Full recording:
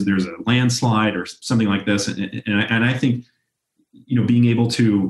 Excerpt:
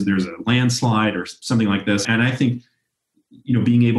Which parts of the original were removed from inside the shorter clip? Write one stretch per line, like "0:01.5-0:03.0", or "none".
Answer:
0:02.0-0:02.7

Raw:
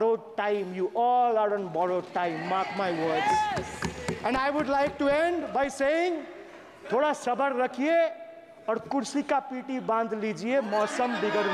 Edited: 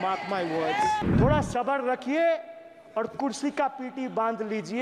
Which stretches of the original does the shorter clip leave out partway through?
0:03.6-0:06.8

